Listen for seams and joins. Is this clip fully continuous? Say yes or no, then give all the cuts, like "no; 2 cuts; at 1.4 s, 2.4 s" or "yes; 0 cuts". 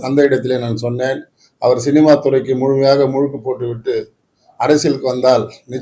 yes; 0 cuts